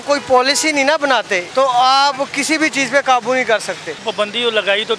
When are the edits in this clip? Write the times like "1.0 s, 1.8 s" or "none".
1.4 s, 4.1 s